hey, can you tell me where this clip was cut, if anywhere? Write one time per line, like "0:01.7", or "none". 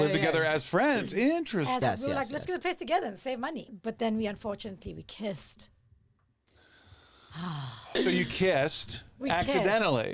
0:01.8
0:03.7
0:08.0